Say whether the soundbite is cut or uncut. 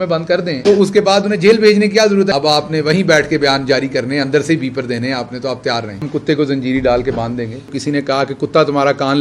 cut